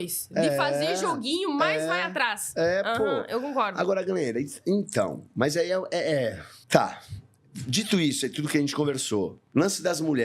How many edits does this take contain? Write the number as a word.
zero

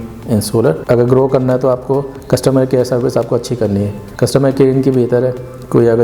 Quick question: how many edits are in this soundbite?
three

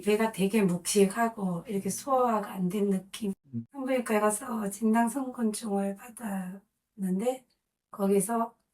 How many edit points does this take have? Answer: one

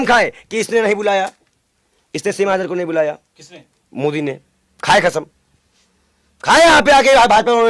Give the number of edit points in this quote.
zero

